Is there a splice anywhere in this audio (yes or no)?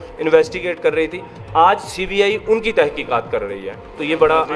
no